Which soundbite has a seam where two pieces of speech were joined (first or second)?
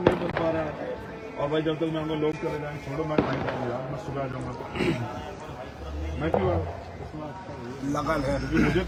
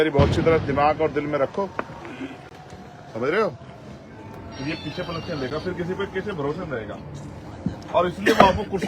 second